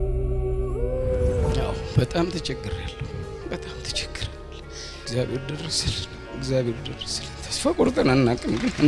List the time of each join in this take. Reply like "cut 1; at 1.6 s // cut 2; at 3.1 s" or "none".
cut 1; at 1.6 s